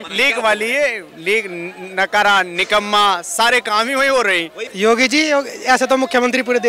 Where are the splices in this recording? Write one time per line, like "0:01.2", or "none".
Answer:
0:04.6